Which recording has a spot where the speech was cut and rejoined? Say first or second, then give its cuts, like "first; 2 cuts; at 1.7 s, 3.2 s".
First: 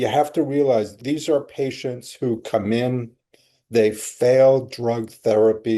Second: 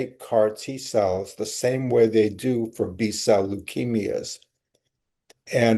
first; 1 cut; at 1.0 s